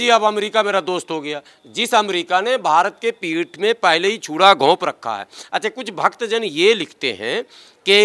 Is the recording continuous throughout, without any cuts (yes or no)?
yes